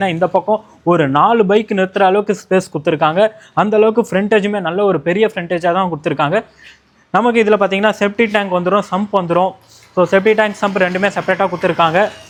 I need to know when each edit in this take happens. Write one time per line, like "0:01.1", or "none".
none